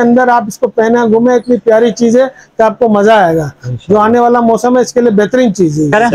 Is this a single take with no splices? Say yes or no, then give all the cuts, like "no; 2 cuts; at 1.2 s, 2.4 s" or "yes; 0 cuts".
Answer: yes; 0 cuts